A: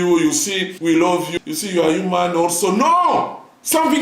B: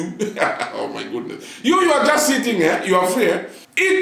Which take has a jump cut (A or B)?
A